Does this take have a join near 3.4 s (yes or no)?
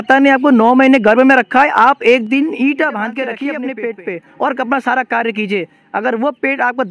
yes